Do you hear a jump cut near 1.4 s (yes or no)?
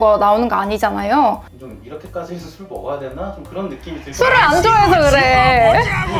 yes